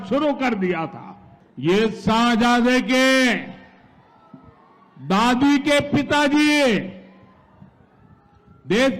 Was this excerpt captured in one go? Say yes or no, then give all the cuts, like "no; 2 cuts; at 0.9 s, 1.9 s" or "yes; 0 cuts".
yes; 0 cuts